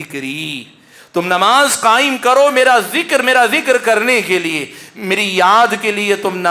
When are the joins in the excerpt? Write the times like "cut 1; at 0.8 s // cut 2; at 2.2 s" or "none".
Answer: none